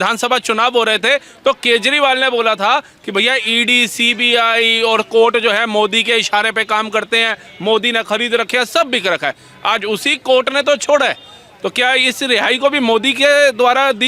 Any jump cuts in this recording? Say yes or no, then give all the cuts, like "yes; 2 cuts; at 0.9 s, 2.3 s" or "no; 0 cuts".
no; 0 cuts